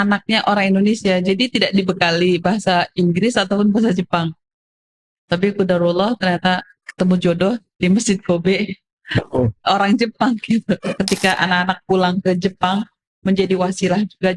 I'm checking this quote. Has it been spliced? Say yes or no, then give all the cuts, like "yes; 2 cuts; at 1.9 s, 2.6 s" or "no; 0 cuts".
yes; 1 cut; at 10.9 s